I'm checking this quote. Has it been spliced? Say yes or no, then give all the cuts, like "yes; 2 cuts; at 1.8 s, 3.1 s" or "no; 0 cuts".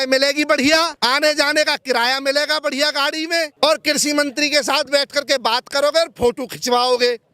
yes; 2 cuts; at 0.9 s, 3.5 s